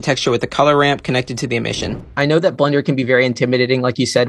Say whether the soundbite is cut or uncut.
cut